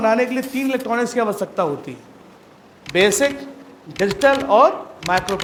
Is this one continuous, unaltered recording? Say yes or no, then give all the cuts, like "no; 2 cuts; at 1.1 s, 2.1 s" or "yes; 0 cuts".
yes; 0 cuts